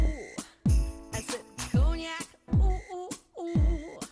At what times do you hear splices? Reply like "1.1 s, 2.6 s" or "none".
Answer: none